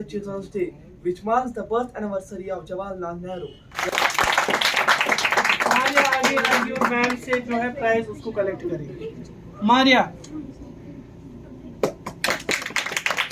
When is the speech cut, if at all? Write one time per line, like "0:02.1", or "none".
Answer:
0:03.8